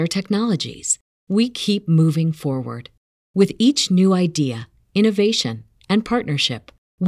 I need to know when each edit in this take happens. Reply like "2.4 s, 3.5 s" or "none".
none